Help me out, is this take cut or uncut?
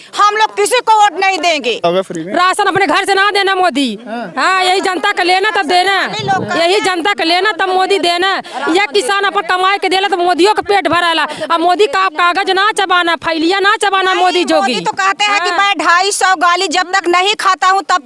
cut